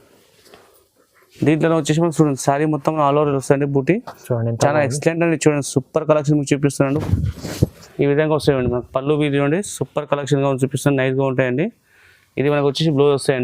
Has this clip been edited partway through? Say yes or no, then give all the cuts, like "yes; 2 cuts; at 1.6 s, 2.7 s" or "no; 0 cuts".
yes; 1 cut; at 7.0 s